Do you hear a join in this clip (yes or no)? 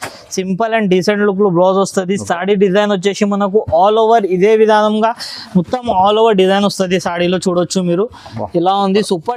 no